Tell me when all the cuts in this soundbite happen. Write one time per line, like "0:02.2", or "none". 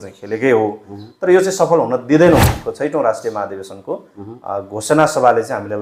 0:02.5